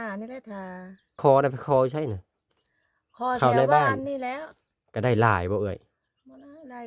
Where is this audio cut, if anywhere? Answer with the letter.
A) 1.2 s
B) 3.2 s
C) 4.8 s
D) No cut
A